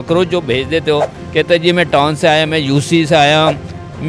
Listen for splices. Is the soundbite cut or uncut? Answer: uncut